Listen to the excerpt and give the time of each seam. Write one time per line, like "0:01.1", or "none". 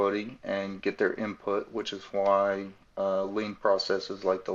none